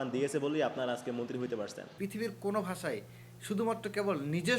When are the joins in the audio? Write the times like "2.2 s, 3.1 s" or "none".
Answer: 1.8 s